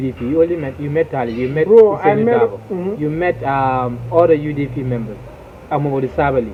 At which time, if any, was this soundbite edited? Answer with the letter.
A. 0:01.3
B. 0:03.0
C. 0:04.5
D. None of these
D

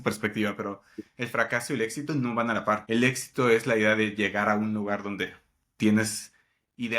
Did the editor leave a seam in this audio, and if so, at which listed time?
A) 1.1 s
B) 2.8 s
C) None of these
B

